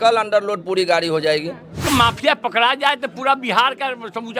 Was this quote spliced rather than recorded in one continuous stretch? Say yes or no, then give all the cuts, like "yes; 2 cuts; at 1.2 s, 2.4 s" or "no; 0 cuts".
yes; 1 cut; at 1.8 s